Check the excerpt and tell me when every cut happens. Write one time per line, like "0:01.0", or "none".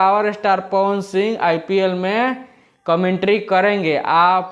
none

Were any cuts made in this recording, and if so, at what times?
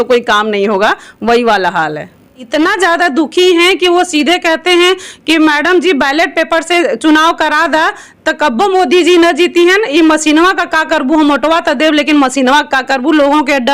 0:02.4

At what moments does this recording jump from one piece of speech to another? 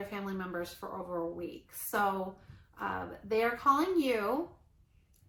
none

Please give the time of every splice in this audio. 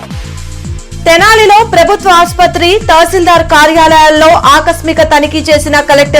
none

